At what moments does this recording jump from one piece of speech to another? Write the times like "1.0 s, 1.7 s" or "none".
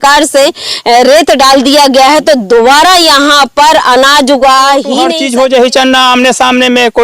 5.1 s